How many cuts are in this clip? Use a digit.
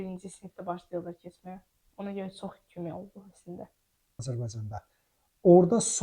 1